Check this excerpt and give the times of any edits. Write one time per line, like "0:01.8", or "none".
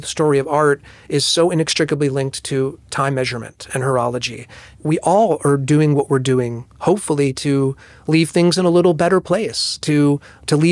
0:04.6